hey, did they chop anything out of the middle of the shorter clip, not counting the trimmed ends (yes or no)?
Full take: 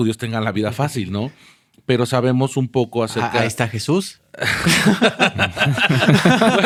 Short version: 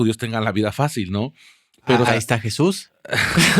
yes